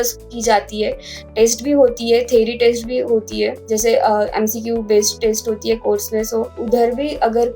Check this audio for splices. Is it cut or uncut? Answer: cut